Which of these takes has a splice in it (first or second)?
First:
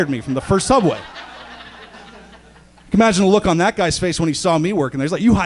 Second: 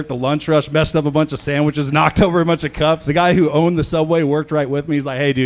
second